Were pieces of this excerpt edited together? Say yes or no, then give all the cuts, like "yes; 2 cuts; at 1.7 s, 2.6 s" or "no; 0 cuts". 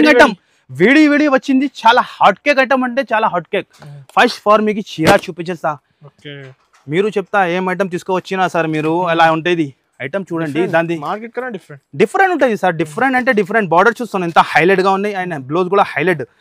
no; 0 cuts